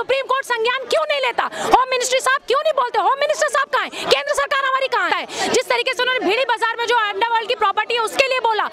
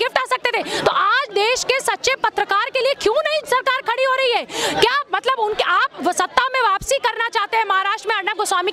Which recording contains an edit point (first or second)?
first